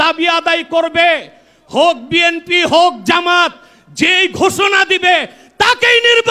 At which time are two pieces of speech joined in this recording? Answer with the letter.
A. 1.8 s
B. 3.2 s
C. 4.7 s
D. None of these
D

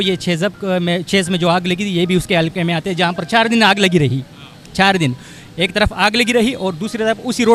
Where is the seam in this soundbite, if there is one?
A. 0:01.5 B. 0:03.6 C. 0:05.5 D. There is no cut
D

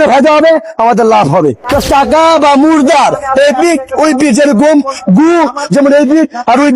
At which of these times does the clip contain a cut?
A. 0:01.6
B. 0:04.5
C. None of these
A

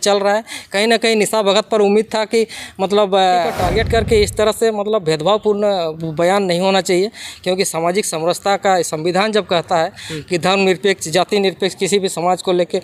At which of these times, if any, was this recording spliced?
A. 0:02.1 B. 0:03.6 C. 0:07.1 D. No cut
B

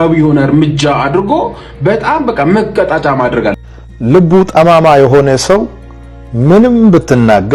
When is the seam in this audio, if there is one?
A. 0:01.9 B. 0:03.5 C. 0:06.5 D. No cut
D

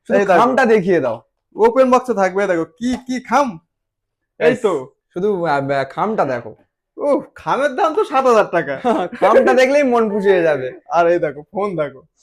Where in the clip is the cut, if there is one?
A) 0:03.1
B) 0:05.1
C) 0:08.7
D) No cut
D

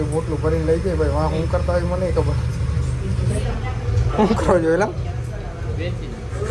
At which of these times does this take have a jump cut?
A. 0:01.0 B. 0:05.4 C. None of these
C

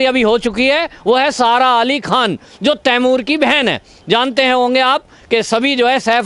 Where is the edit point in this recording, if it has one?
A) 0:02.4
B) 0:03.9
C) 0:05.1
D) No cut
D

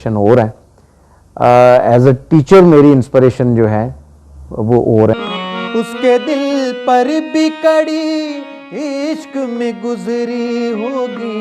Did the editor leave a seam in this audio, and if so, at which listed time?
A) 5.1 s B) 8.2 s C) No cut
A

